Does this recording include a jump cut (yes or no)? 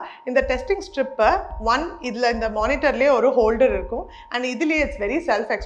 no